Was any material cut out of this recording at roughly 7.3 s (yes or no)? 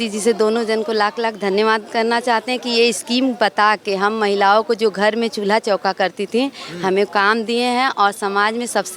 no